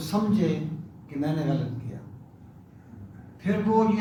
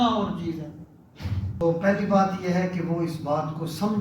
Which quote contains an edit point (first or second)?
second